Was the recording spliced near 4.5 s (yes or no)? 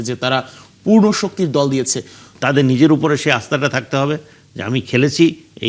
no